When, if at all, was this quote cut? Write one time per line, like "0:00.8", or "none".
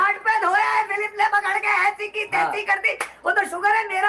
none

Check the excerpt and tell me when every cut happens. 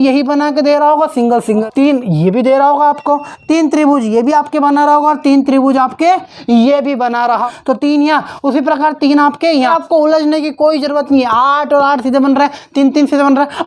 0:01.6
0:07.4
0:09.7

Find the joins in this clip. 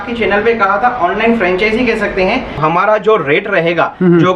0:02.6

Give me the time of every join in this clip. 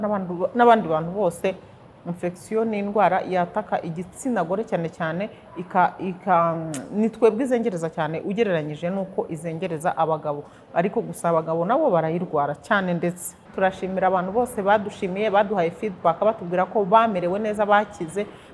0:13.4

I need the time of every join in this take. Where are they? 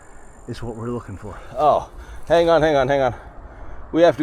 0:01.4

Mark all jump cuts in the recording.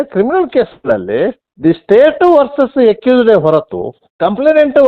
none

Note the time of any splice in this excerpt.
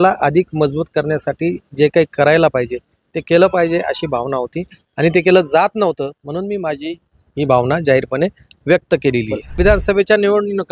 0:09.4

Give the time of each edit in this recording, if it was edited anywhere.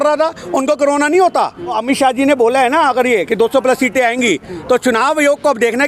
0:01.8

